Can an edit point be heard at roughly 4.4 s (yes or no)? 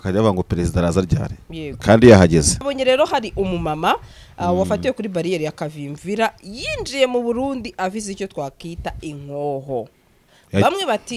no